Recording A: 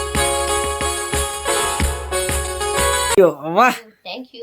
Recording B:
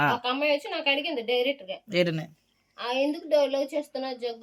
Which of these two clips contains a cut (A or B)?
A